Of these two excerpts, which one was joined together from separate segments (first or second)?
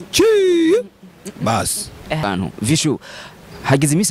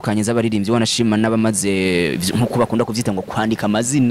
first